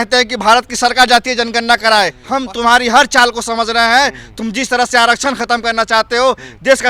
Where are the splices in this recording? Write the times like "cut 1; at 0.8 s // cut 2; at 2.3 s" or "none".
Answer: cut 1; at 2.2 s